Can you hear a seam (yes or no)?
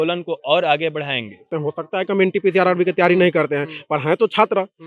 yes